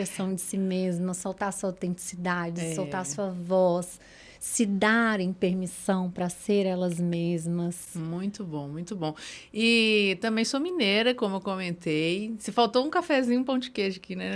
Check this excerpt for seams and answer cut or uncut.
uncut